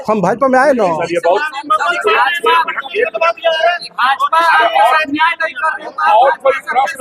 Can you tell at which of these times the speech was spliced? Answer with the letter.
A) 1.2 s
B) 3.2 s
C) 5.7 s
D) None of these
D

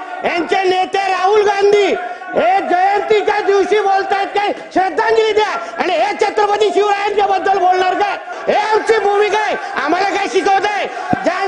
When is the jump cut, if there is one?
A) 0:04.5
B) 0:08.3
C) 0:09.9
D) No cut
B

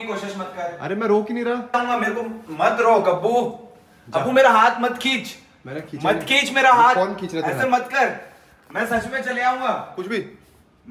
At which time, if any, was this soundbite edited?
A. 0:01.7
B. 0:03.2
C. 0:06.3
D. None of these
A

